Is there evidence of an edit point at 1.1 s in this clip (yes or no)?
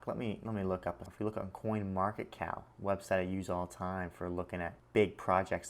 yes